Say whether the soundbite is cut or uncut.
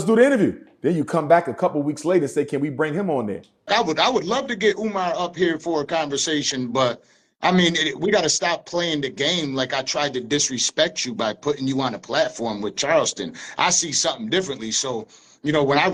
uncut